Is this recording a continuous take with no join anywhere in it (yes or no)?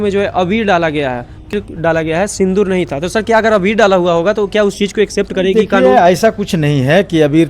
no